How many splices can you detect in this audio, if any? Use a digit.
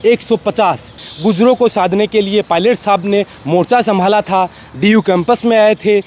1